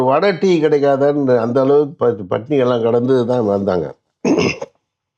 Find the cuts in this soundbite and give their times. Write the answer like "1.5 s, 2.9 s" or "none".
none